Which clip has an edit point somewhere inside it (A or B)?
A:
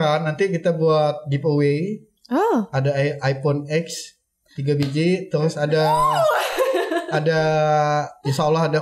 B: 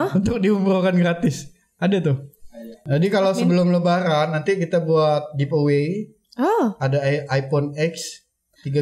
B